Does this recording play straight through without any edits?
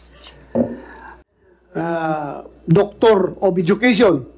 no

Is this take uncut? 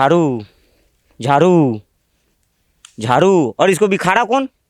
yes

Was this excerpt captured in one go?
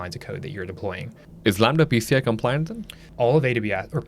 no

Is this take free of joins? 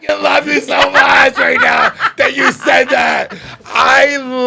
yes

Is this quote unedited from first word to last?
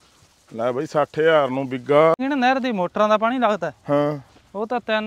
no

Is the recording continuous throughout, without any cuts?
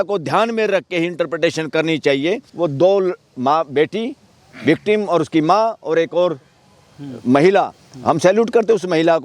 no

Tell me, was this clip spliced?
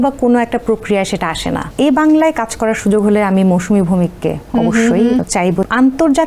yes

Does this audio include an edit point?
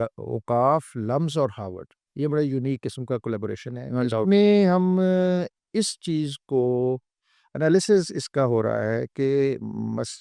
no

